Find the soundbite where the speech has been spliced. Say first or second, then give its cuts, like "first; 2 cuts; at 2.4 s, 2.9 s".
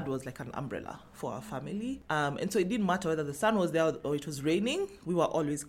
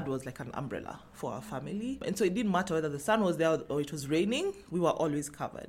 second; 1 cut; at 2.0 s